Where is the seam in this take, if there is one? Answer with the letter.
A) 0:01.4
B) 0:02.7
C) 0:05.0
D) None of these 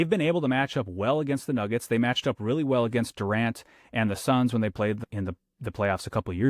C